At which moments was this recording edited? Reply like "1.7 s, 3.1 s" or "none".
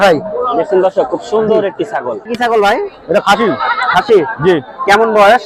2.3 s